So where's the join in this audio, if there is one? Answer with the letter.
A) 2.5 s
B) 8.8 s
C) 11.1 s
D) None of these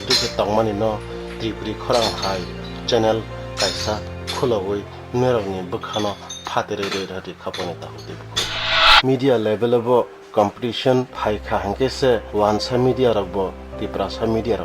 B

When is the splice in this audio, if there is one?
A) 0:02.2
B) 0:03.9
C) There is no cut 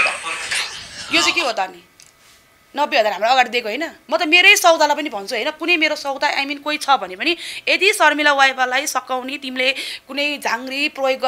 B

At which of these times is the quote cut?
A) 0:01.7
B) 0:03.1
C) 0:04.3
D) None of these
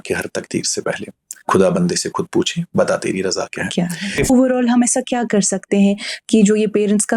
C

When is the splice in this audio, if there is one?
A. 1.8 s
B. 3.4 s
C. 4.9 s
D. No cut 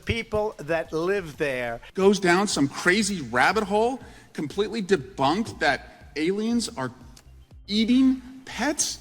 A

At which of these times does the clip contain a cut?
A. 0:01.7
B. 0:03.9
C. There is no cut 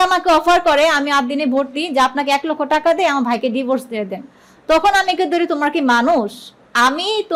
C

